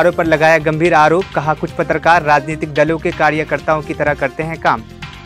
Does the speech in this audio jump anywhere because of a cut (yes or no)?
no